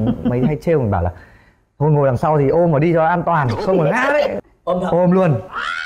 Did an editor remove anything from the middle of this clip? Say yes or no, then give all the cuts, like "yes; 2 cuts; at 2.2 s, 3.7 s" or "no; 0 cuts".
yes; 1 cut; at 4.3 s